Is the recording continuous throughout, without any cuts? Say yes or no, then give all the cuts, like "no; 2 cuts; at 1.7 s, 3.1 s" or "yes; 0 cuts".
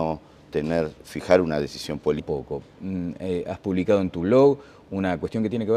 yes; 0 cuts